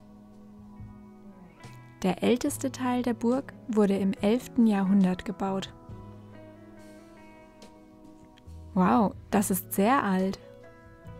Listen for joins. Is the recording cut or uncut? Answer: uncut